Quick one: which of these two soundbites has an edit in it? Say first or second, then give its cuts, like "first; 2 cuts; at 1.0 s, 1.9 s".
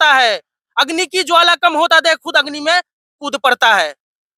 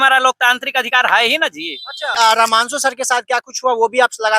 second; 1 cut; at 2.1 s